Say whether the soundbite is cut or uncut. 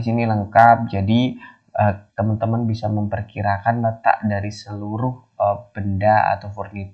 uncut